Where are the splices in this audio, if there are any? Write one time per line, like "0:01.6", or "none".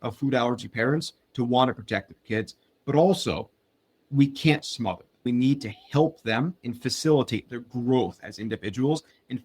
0:05.1